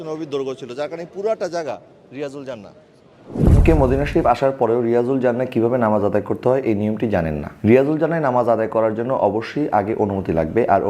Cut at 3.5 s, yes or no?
yes